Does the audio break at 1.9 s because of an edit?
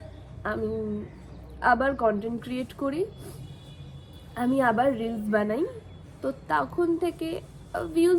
no; 0 cuts

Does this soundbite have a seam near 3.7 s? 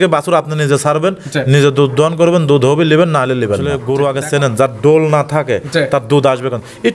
yes; 1 cut; at 3.7 s

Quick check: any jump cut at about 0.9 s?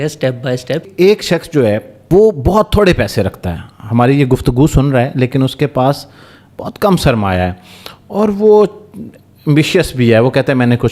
yes; 2 cuts; at 0.9 s, 1.9 s

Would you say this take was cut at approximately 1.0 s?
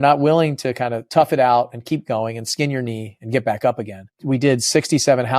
yes; 2 cuts; at 1.0 s, 4.1 s

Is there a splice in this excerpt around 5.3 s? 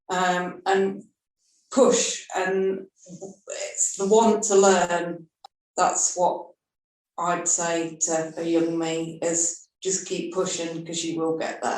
yes; 1 cut; at 5.3 s

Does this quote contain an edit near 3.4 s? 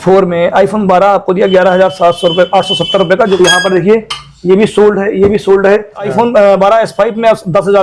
yes; 2 cuts; at 3.4 s, 6.1 s

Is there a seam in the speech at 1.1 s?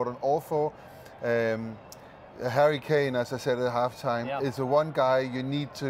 yes; 1 cut; at 1.1 s

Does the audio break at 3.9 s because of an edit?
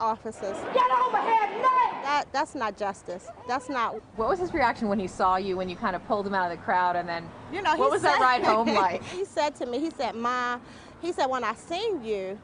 no; 0 cuts

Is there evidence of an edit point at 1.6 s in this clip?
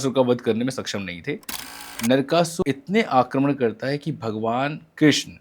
yes; 1 cut; at 1.6 s

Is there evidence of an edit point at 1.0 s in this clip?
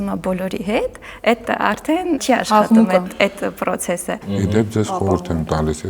no; 2 cuts; at 2.2 s, 4.2 s

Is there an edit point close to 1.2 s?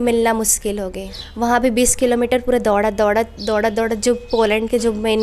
yes; 1 cut; at 1.2 s

